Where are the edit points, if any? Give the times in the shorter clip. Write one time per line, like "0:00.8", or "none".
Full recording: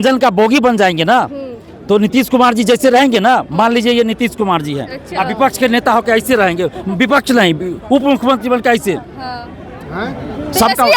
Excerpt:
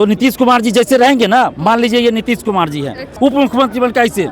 0:03.0